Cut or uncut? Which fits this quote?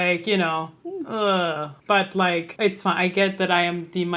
cut